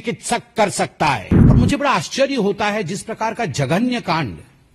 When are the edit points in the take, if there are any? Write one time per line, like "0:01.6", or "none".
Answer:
0:01.3